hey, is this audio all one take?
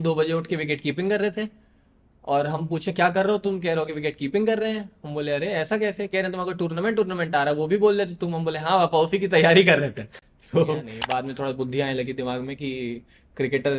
no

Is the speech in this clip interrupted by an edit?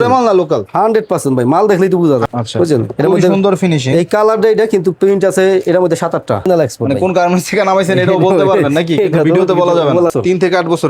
yes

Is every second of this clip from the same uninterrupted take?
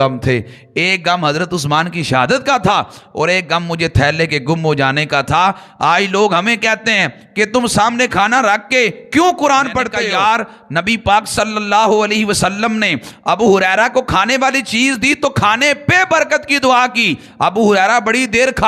no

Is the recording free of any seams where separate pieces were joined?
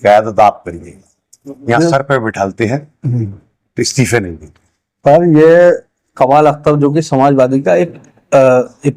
yes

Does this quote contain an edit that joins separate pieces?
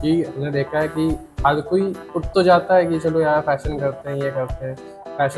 no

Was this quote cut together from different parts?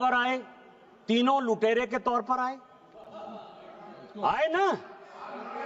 no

